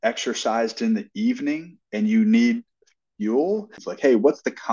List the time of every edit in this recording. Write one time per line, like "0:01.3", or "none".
0:03.8